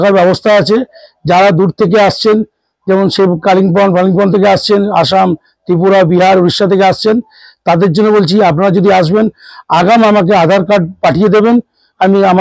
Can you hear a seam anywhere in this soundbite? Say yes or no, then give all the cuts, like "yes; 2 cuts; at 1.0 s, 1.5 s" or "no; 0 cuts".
no; 0 cuts